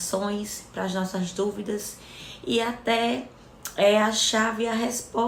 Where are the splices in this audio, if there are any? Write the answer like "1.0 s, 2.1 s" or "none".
none